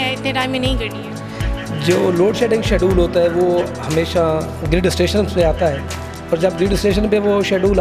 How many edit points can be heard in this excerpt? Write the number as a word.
zero